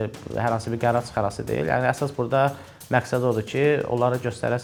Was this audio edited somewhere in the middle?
no; 0 cuts

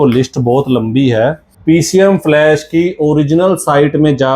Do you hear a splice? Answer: yes; 1 cut; at 1.5 s

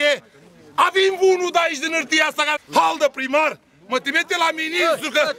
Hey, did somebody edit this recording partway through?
yes; 1 cut; at 2.6 s

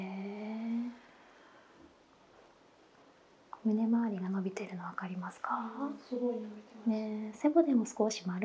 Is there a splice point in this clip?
no; 0 cuts

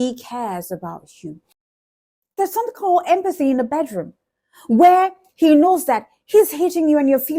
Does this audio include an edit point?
yes; 1 cut; at 1.5 s

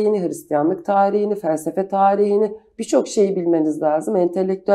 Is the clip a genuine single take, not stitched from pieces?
yes; 0 cuts

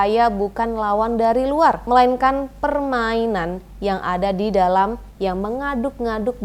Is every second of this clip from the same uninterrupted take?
no; 1 cut; at 1.8 s

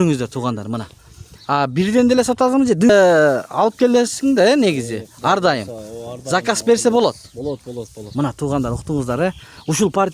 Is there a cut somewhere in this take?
yes; 1 cut; at 2.9 s

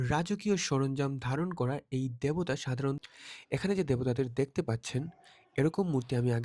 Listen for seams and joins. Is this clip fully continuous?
no; 1 cut; at 3.0 s

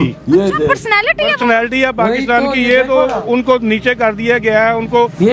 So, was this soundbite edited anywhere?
no; 0 cuts

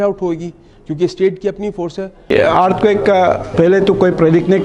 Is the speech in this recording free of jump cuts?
no; 2 cuts; at 2.3 s, 3.5 s

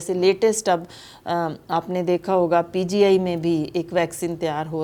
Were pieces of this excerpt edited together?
no; 0 cuts

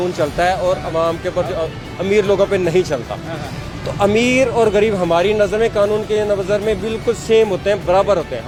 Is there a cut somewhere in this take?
no; 0 cuts

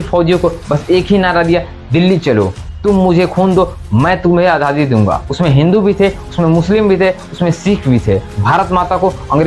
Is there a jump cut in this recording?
yes; 3 cuts; at 2.7 s, 5.3 s, 8.3 s

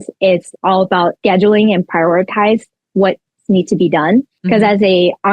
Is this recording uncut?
no; 2 cuts; at 1.2 s, 4.3 s

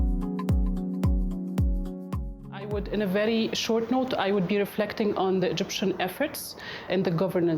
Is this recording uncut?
no; 1 cut; at 2.4 s

